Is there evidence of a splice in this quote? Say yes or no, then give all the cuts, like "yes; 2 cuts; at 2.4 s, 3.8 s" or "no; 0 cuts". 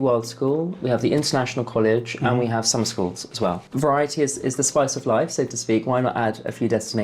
yes; 1 cut; at 3.7 s